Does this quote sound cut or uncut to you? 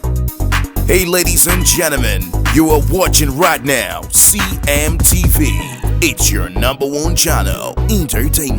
uncut